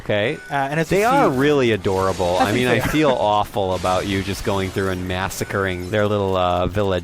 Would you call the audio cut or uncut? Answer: cut